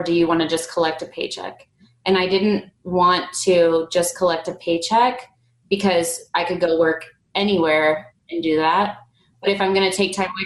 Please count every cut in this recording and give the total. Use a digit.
0